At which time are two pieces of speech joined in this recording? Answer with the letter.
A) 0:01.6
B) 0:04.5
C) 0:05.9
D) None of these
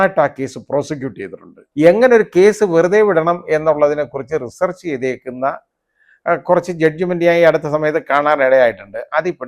A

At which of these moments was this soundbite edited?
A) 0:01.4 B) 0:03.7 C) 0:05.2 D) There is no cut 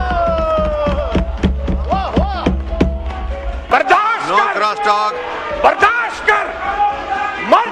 B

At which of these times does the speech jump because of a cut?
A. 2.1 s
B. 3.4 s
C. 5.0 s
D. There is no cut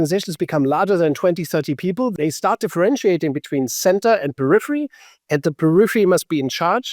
A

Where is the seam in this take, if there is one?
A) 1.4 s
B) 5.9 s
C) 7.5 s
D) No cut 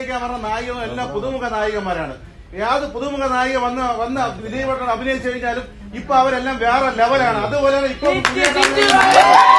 D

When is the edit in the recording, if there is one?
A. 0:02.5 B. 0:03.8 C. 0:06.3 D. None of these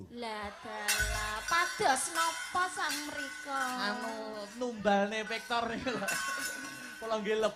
D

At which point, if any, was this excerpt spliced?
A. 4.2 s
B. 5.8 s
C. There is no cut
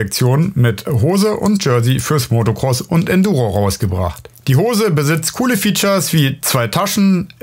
C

